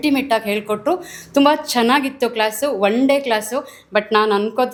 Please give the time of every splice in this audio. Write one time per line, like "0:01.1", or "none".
none